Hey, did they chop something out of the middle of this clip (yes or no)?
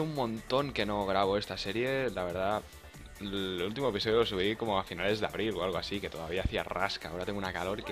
no